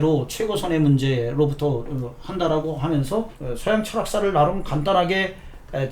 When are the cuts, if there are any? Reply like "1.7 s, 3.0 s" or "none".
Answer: 3.4 s